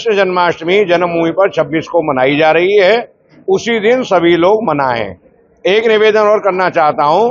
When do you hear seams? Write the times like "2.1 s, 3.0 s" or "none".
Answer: none